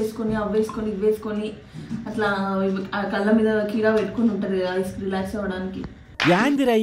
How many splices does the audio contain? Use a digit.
0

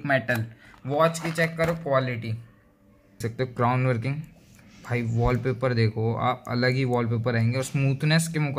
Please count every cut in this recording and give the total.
1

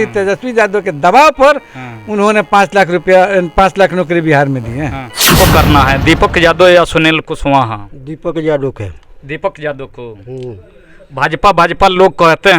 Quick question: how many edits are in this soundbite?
1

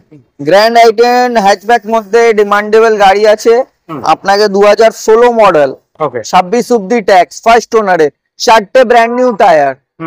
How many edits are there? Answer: 0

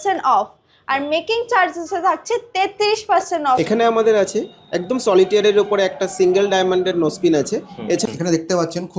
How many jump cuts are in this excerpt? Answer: 2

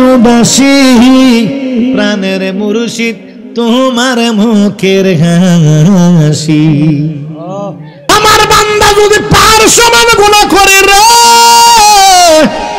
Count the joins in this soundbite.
1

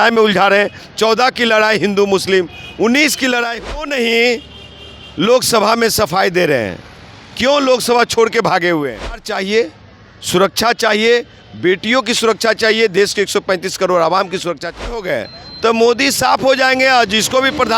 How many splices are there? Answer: 3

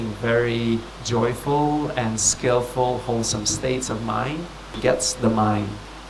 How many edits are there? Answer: 2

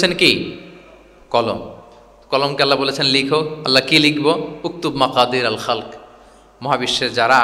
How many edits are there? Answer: 0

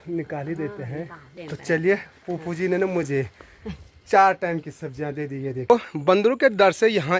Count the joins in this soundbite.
2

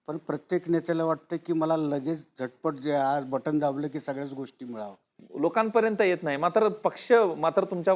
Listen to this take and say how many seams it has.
1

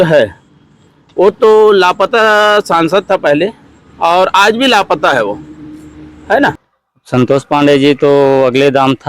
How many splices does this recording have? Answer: 1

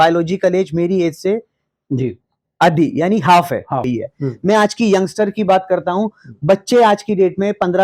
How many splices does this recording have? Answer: 1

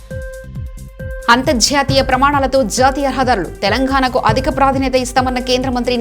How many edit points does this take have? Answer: 1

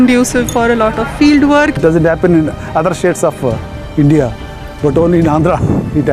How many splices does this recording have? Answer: 1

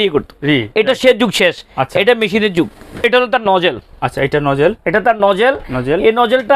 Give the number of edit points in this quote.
1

